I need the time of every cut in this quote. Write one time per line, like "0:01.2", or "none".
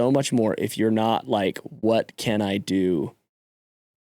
none